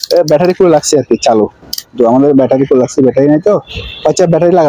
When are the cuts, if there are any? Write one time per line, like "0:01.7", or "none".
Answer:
none